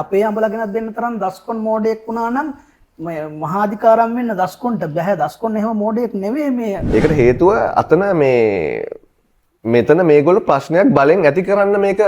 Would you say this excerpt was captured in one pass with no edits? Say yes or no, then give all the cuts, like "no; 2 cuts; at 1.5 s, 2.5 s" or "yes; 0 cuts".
no; 1 cut; at 6.8 s